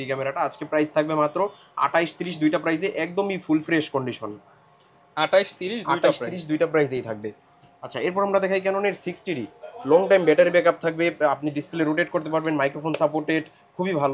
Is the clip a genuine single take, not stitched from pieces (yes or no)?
yes